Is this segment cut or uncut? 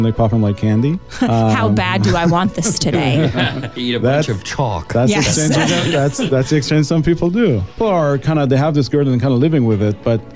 cut